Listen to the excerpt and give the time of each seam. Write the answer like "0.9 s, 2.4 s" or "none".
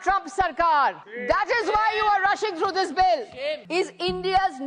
1.1 s, 3.6 s